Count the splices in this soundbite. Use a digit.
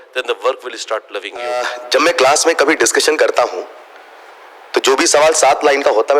1